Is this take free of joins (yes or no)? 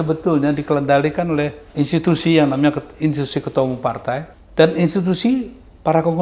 no